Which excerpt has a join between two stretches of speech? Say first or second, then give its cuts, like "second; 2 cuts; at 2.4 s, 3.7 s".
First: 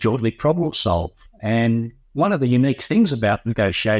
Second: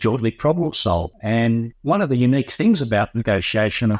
second; 1 cut; at 1.3 s